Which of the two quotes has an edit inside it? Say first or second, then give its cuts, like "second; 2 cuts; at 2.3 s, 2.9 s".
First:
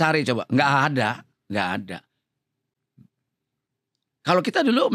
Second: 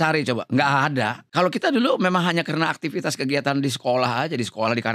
second; 1 cut; at 1.2 s